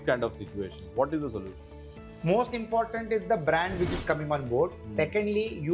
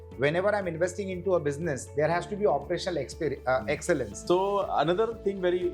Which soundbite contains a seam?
second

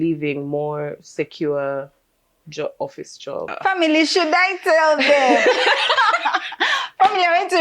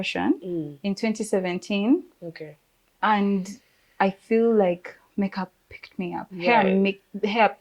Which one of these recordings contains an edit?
first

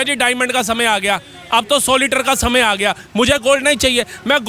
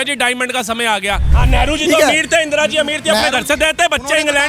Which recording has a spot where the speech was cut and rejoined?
second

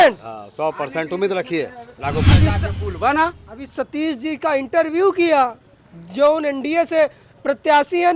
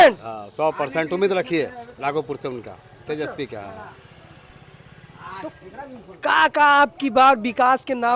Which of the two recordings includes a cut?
first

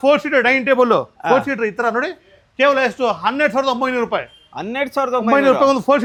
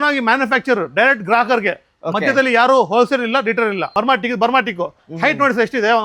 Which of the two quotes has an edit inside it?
second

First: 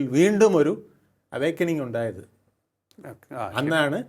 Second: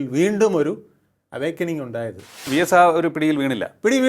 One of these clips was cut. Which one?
second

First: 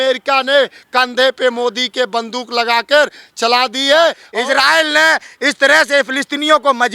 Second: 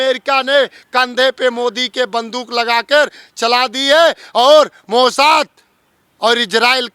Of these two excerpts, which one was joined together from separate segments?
first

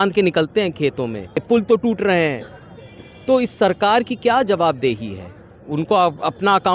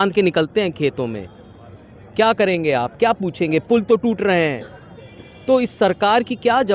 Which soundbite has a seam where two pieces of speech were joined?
first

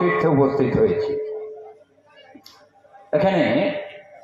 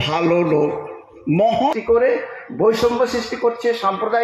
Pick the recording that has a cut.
second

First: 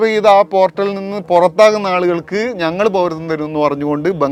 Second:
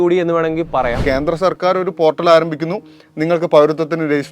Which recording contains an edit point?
second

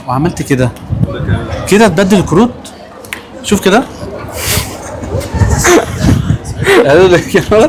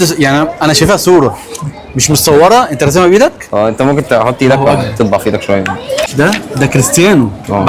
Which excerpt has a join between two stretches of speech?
second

